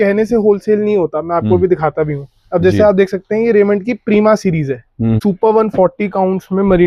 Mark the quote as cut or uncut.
cut